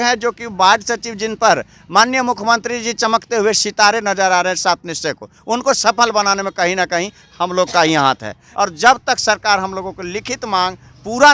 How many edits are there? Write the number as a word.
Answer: one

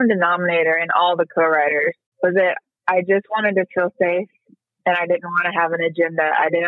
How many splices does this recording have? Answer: one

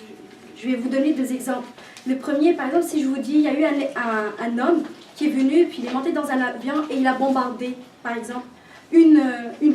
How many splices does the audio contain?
one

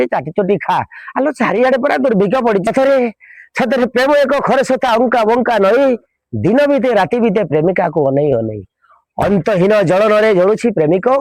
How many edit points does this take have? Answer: one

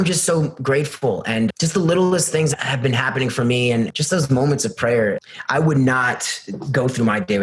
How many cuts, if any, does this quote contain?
four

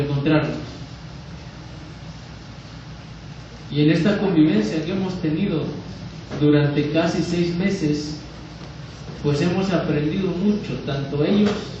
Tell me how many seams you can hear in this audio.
one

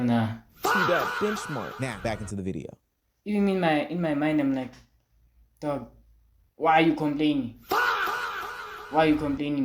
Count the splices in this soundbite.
one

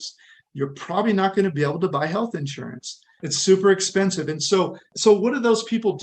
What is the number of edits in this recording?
two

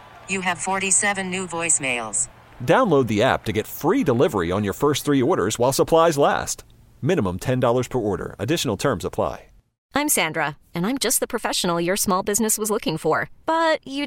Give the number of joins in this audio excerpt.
one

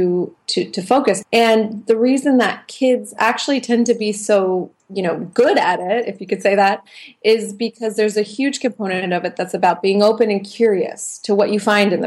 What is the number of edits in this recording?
one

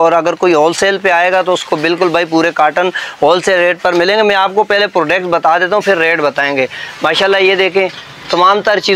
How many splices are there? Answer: zero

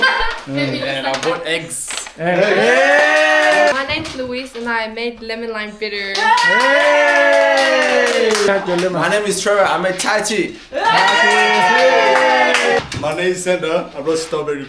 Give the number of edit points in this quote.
three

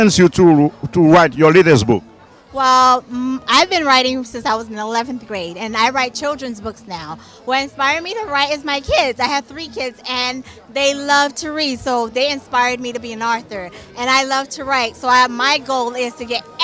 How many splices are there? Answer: zero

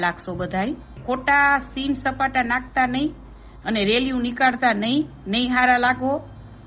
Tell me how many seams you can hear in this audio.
one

